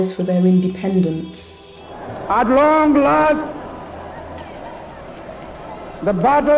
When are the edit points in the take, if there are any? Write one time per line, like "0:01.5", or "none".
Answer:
0:03.4